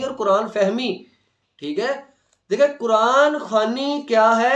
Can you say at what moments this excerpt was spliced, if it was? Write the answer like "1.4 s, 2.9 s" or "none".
none